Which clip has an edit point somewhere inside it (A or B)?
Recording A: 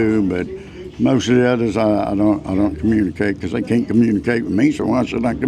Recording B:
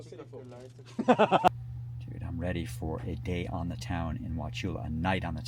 B